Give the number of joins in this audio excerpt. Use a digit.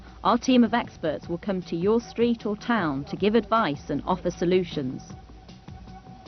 1